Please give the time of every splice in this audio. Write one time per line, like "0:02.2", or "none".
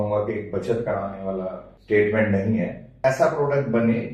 0:01.7
0:02.9